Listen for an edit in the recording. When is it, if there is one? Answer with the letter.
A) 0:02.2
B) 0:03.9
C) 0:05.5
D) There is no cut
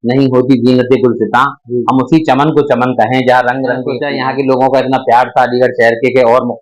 B